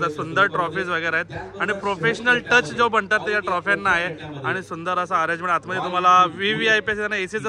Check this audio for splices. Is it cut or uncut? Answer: uncut